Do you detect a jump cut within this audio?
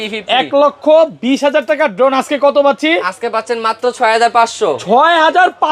no; 0 cuts

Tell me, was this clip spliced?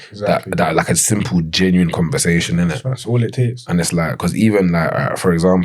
no; 0 cuts

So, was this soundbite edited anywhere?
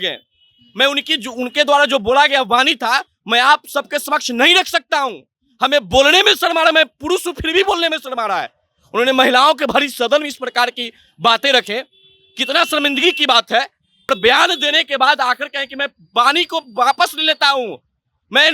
yes; 1 cut; at 14.1 s

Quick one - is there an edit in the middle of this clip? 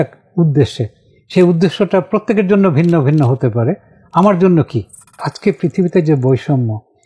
yes; 1 cut; at 5.3 s

